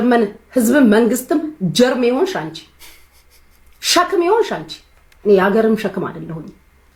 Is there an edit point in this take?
no; 0 cuts

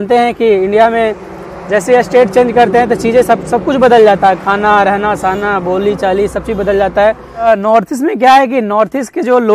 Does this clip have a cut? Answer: yes; 1 cut; at 7.4 s

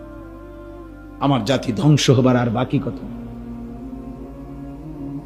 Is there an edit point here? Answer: yes; 2 cuts; at 0.9 s, 3.4 s

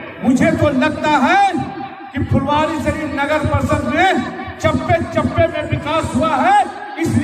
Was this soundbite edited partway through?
no; 0 cuts

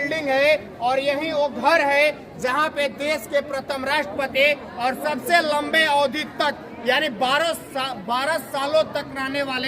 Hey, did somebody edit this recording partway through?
no; 0 cuts

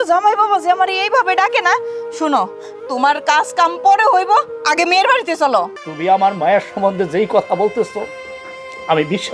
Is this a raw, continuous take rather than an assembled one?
no; 1 cut; at 5.8 s

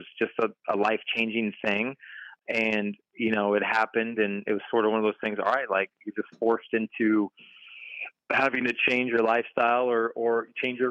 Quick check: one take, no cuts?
no; 1 cut; at 2.3 s

